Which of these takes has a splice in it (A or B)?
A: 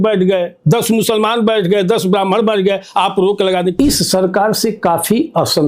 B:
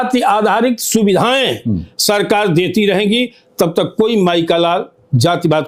A